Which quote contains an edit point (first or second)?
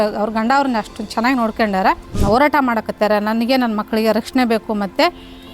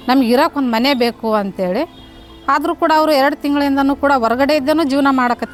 first